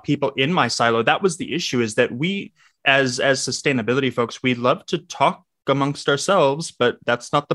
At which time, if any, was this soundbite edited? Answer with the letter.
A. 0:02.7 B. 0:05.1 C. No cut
C